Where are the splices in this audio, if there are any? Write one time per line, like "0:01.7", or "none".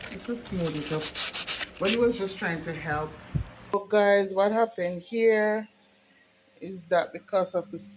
0:03.7